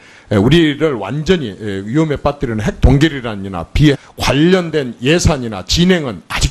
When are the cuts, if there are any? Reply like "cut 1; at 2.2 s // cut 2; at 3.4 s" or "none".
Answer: none